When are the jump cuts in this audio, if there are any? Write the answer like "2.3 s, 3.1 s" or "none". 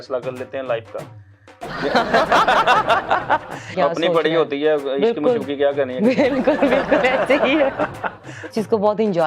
3.7 s, 8.5 s